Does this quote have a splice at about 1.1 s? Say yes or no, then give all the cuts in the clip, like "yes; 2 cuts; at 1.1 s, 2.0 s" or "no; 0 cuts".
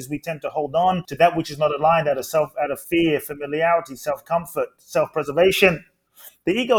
yes; 2 cuts; at 1.1 s, 2.8 s